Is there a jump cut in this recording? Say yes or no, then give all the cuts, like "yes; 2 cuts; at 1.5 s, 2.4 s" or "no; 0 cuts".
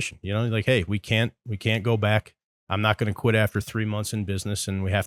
no; 0 cuts